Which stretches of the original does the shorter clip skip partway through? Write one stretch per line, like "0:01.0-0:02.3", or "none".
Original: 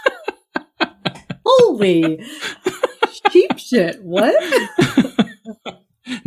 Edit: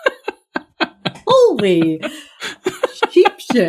0:01.2-0:01.4